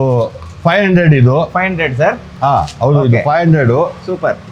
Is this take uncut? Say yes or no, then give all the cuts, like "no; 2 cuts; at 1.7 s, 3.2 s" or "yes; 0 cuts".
yes; 0 cuts